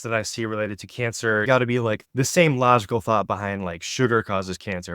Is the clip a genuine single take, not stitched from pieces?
no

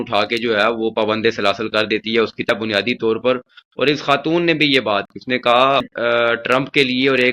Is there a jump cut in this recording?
yes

